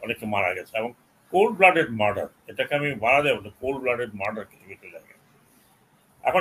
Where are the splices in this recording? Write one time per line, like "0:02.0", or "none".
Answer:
none